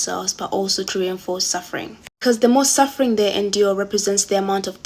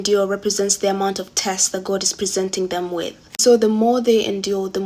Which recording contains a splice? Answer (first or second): first